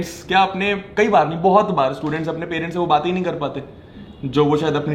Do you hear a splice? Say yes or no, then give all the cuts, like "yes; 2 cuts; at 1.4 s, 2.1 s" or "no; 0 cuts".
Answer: no; 0 cuts